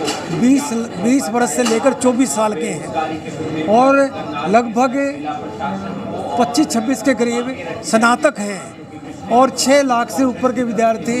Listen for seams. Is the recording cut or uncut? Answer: uncut